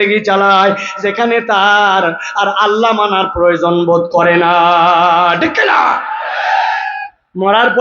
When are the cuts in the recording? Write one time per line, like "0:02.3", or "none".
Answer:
none